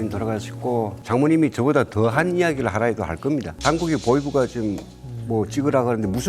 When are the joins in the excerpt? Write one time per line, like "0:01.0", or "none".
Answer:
0:01.0
0:03.5